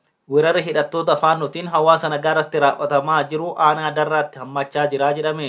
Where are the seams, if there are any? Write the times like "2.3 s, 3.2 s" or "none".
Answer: none